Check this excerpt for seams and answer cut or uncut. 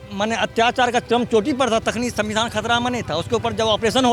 uncut